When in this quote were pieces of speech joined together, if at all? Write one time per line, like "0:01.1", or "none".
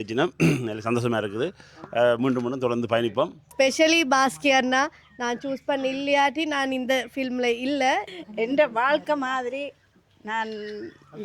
0:03.4
0:08.2